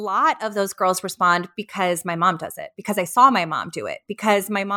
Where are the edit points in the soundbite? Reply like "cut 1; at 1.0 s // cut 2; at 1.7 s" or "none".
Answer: none

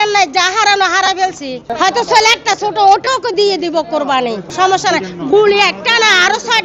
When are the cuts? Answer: cut 1; at 1.7 s // cut 2; at 4.5 s

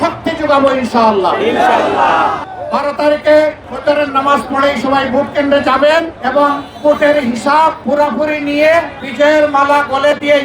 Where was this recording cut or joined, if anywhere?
cut 1; at 2.4 s // cut 2; at 3.7 s // cut 3; at 6.2 s // cut 4; at 7.8 s // cut 5; at 9.0 s

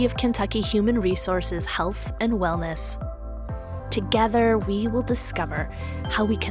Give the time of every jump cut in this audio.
cut 1; at 3.7 s

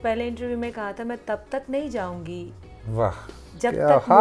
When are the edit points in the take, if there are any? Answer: none

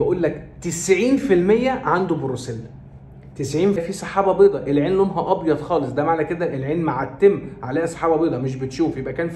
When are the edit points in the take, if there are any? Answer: cut 1; at 3.8 s

